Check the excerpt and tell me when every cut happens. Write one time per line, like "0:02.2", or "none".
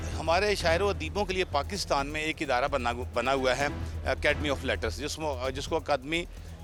none